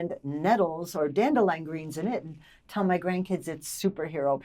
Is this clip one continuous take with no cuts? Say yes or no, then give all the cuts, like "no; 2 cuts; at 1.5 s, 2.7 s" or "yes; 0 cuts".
yes; 0 cuts